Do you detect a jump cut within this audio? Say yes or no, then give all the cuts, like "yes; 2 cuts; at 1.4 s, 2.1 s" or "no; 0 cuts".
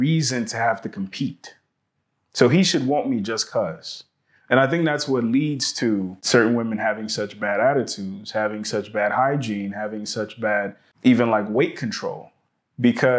yes; 2 cuts; at 6.2 s, 10.9 s